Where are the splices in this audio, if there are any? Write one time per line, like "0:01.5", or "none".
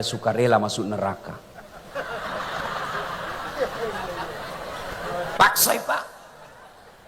none